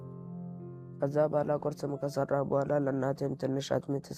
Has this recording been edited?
no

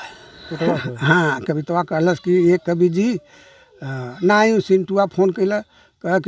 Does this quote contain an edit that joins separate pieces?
no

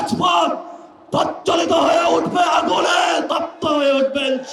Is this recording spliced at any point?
no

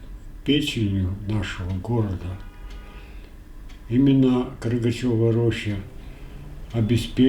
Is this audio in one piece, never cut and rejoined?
yes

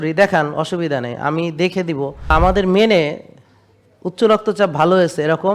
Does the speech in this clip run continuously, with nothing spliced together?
no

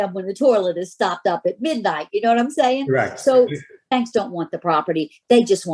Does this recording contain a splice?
yes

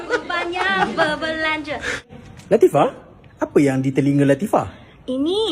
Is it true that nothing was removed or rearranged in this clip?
no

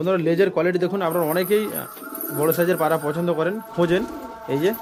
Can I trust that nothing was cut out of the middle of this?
yes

